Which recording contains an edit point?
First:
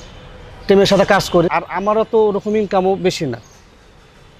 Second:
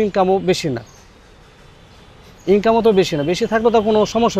first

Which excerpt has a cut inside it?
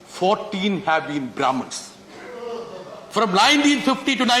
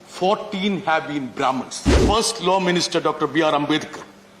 second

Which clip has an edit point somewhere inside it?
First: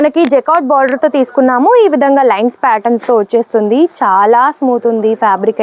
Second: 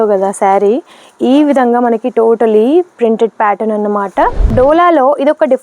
second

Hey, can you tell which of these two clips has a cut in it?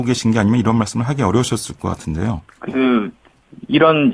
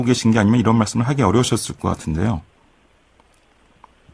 first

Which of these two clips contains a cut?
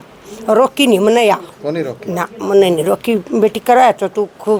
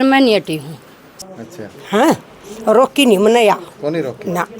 second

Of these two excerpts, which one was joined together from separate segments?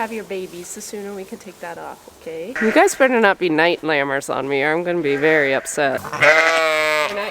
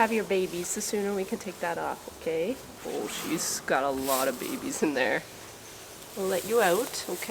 first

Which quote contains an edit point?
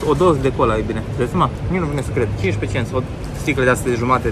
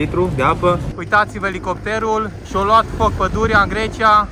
second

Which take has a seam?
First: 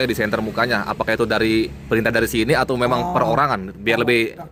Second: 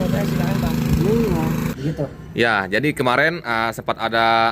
second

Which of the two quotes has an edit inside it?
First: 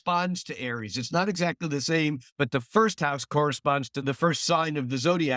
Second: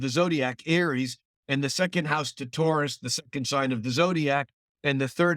first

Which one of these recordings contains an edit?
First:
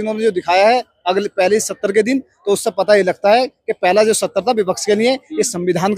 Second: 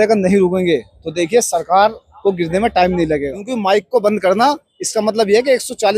second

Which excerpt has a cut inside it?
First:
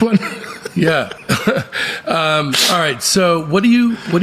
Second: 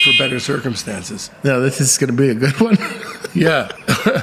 second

